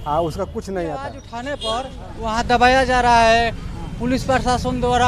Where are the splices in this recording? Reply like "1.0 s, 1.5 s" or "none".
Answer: 1.3 s